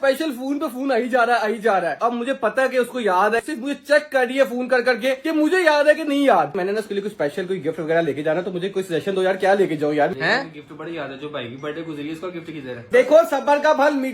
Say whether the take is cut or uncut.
cut